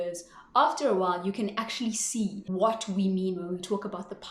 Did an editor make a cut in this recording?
yes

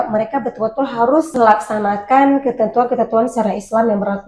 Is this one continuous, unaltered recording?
no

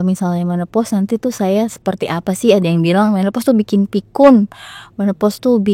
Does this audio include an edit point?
no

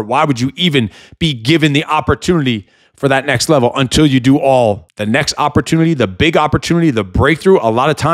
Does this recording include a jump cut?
yes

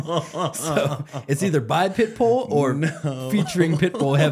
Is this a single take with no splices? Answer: yes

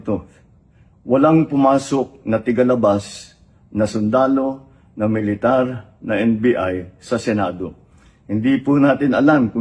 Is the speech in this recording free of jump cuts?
yes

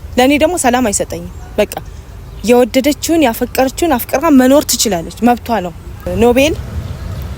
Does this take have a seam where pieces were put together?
yes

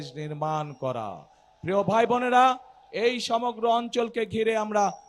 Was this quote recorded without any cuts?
yes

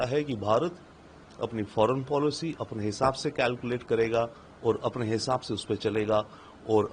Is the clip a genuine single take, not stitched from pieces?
yes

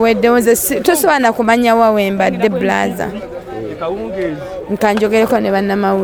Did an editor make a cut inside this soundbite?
no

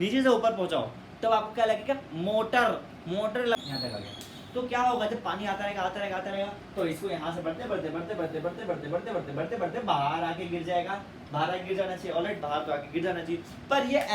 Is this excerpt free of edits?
no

